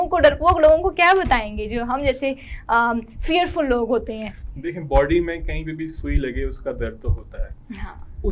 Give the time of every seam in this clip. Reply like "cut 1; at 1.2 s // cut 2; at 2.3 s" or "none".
none